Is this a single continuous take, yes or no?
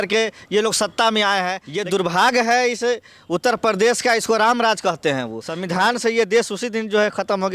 no